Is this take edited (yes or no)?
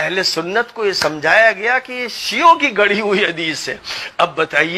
no